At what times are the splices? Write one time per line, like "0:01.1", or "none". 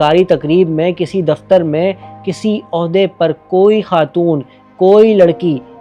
none